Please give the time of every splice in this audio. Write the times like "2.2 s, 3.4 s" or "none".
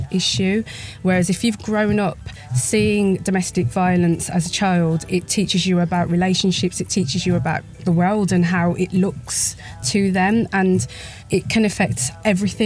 6.8 s, 7.7 s, 9.8 s, 11.4 s